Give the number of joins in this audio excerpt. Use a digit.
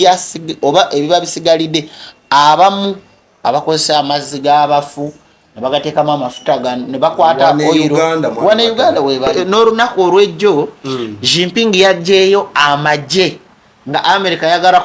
1